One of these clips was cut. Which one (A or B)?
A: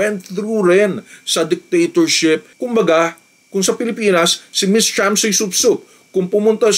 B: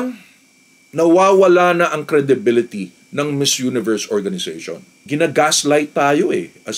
A